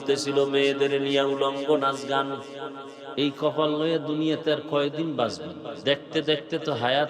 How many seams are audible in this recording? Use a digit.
2